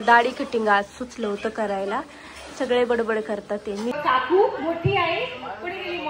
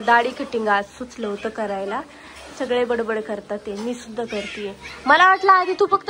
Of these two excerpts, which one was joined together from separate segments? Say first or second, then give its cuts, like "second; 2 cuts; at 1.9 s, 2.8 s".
first; 1 cut; at 4.0 s